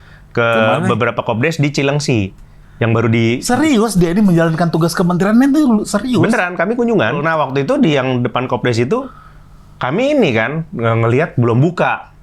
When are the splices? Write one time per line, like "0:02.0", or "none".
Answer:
0:07.2